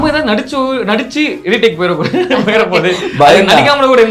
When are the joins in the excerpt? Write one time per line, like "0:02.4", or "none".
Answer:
none